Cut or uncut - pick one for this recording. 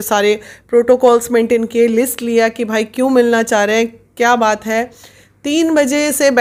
uncut